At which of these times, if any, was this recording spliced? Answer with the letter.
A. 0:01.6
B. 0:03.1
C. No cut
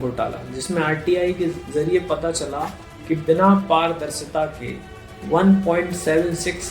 A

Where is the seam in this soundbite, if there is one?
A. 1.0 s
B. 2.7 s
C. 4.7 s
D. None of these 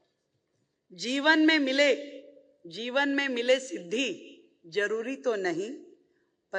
D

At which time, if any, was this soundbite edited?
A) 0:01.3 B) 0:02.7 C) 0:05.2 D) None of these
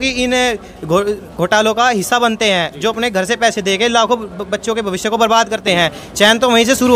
D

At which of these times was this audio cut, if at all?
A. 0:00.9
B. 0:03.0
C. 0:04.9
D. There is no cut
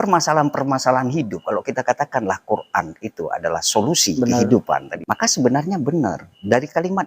C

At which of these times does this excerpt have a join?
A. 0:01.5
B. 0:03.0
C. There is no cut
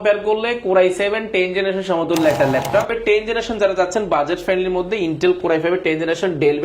B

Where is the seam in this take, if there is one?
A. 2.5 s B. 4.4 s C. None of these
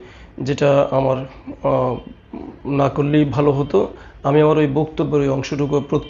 C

